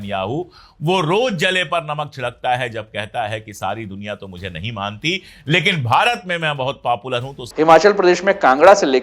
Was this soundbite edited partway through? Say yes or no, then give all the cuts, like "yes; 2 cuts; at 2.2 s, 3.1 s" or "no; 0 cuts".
yes; 1 cut; at 7.4 s